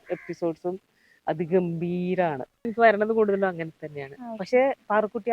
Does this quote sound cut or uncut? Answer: cut